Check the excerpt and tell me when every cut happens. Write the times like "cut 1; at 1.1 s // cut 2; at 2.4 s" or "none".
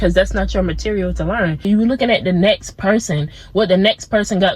cut 1; at 1.7 s